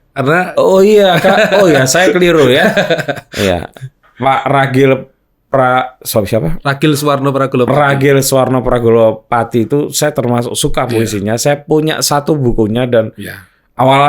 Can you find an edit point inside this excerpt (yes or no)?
no